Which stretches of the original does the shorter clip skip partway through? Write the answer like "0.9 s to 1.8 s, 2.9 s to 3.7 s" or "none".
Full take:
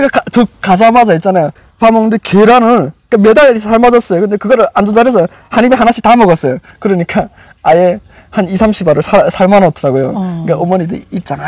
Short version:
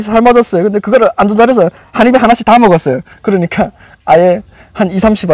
none